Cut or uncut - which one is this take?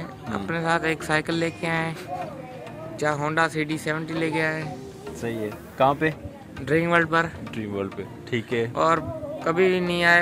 uncut